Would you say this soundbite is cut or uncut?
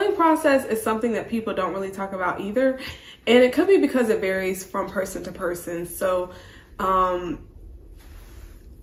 uncut